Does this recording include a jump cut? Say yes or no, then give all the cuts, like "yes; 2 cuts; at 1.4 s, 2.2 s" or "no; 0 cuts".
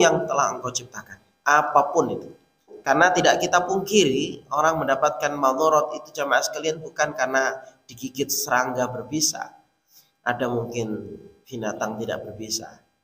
yes; 1 cut; at 2.7 s